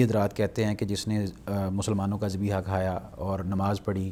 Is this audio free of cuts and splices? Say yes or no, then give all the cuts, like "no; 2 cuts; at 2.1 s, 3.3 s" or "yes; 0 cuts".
yes; 0 cuts